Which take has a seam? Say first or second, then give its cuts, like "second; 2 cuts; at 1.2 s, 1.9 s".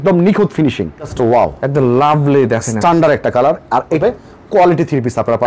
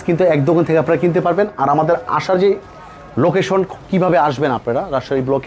first; 2 cuts; at 1.1 s, 4.0 s